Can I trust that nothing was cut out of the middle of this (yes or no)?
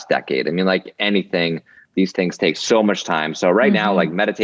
no